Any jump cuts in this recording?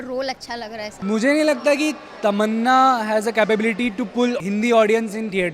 yes; 2 cuts; at 1.0 s, 4.4 s

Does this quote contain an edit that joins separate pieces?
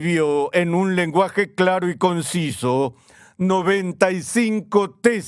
no; 0 cuts

